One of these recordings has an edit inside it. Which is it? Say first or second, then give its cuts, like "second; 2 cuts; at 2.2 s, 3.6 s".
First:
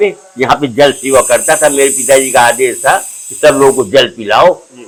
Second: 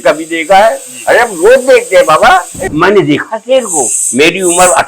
second; 1 cut; at 2.6 s